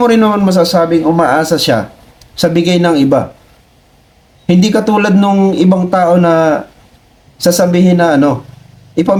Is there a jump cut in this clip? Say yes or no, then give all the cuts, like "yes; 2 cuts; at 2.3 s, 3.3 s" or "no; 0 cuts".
no; 0 cuts